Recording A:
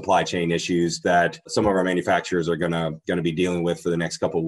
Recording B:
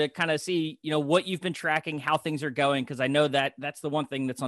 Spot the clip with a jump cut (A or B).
A